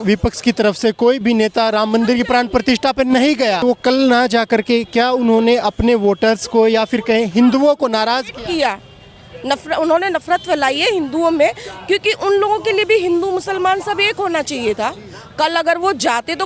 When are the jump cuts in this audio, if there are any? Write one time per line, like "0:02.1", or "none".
0:03.6